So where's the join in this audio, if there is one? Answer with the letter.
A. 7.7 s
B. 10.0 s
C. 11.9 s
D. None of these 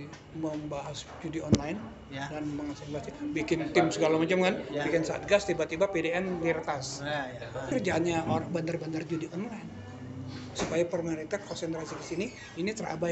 A